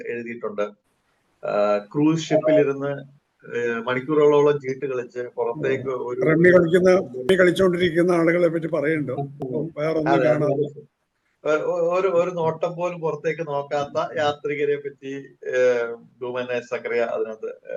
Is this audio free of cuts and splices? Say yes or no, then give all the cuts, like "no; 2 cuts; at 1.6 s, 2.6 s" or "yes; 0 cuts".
yes; 0 cuts